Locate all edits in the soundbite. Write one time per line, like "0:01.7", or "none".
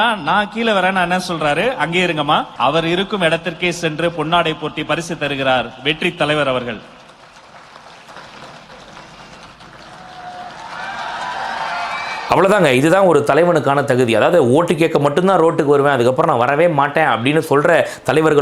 none